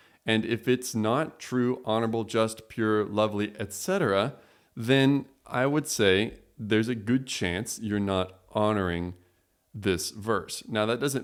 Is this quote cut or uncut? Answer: uncut